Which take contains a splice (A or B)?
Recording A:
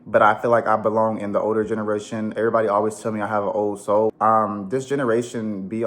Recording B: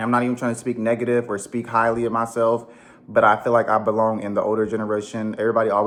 A